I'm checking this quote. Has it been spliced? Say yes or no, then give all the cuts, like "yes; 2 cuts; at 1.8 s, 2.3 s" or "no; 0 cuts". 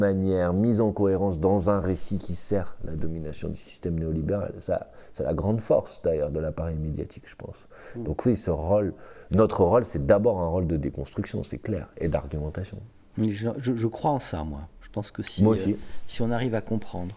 no; 0 cuts